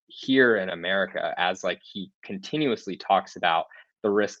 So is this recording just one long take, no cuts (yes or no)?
yes